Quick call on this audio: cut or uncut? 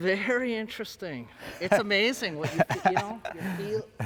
uncut